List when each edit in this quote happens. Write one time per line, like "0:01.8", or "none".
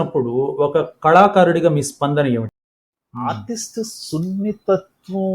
0:02.5